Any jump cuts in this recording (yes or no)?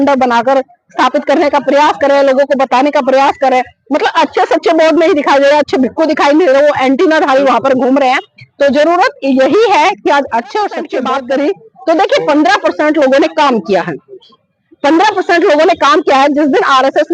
yes